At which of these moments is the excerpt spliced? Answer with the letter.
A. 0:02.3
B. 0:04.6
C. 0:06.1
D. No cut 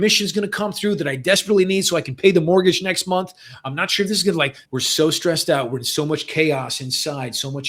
B